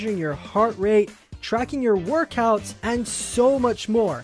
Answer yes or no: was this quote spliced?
no